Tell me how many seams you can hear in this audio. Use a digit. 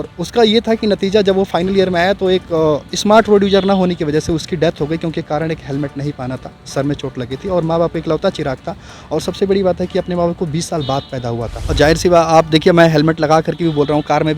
1